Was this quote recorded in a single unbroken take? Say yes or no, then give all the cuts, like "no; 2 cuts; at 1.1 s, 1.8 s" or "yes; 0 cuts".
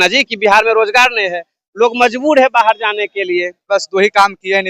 no; 1 cut; at 3.7 s